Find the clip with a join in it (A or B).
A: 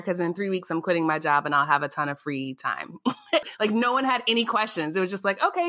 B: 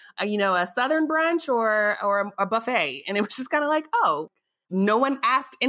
A